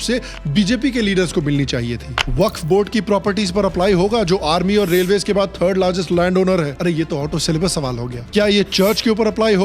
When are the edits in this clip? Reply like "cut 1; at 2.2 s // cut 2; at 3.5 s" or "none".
cut 1; at 2.2 s